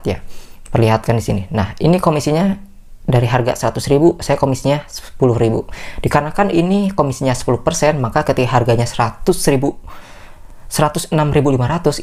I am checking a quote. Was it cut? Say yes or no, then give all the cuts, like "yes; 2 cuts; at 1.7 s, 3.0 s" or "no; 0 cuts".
no; 0 cuts